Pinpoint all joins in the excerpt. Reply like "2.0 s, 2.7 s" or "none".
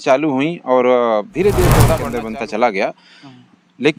2.0 s